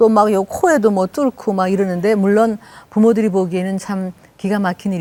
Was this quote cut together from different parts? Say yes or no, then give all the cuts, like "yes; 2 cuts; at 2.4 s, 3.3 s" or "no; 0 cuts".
no; 0 cuts